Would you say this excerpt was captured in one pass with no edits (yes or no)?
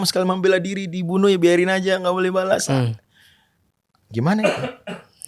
yes